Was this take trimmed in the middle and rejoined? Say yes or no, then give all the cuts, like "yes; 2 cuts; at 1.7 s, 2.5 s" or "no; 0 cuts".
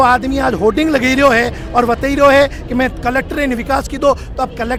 no; 0 cuts